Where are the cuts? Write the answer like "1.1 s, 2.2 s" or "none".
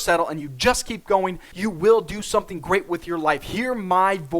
1.5 s